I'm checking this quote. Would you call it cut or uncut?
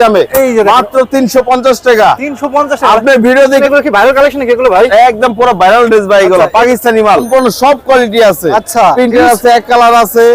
cut